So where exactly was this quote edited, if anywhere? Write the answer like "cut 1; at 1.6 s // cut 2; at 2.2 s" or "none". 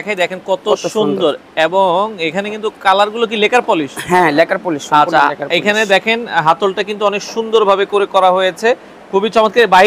none